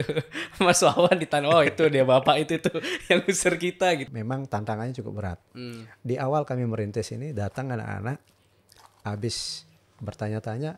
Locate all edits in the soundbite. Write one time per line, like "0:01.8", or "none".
0:04.1